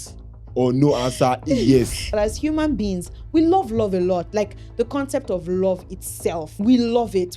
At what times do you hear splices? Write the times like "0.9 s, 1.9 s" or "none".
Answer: 2.1 s, 6.5 s